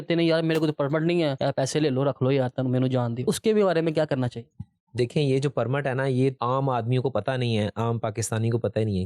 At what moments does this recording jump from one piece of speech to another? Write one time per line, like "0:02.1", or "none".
none